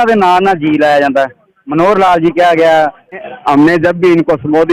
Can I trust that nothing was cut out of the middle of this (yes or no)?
no